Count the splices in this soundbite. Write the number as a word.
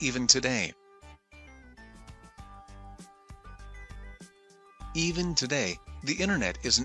two